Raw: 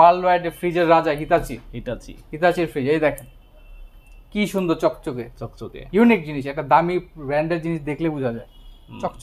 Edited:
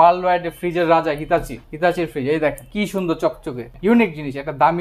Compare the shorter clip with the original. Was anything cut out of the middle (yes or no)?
yes